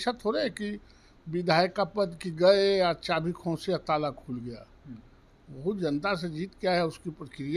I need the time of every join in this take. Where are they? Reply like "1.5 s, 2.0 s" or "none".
none